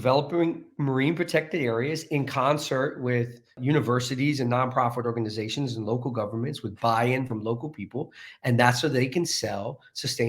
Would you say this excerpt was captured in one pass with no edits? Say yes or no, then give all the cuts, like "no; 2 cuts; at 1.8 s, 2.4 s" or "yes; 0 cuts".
no; 1 cut; at 3.5 s